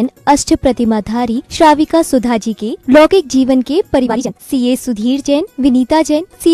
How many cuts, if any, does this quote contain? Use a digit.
1